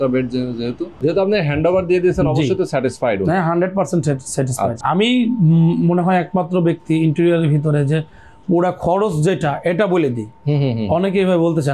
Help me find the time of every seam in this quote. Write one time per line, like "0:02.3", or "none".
0:01.0
0:04.8